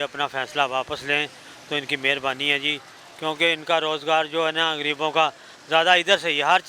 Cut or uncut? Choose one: uncut